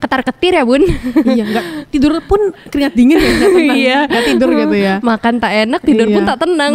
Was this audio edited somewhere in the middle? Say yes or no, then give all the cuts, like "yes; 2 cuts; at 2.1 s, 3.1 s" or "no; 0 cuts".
no; 0 cuts